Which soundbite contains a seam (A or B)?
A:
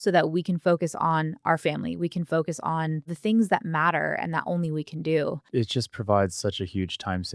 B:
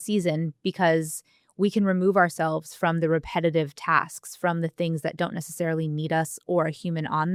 A